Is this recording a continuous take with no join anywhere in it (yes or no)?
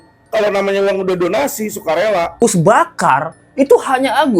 no